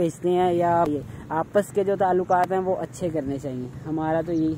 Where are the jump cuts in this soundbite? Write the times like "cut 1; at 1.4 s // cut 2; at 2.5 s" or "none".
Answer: cut 1; at 0.9 s